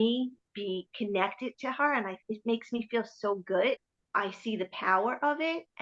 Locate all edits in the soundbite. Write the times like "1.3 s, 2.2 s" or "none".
3.9 s